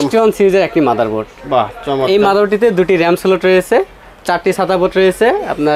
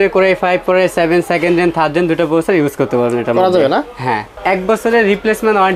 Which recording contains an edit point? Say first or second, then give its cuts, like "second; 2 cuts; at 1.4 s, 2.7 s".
second; 1 cut; at 4.3 s